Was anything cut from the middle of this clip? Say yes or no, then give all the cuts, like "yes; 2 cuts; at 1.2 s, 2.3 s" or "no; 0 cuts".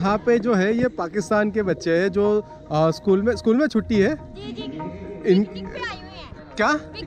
no; 0 cuts